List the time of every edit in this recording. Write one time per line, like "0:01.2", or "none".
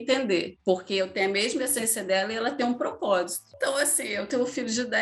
0:03.5